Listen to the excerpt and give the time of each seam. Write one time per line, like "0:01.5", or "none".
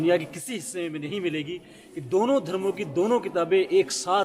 0:01.1